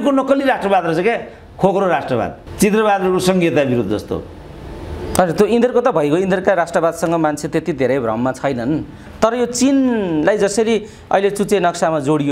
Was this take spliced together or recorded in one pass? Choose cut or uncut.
uncut